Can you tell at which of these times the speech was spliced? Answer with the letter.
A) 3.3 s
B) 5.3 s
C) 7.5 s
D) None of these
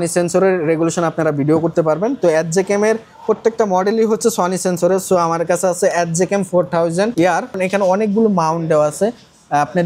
C